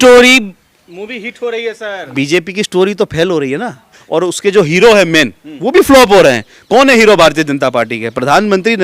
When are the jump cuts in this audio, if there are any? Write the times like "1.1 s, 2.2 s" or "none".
2.0 s, 4.0 s